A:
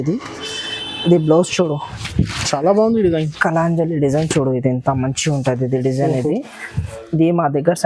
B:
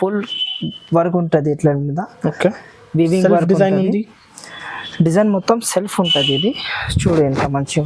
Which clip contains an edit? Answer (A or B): A